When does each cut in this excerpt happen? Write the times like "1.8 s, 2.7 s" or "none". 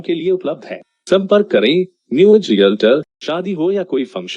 3.2 s